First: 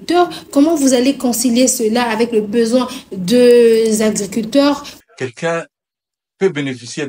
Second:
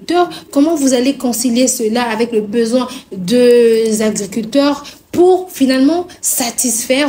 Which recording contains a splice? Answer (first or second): first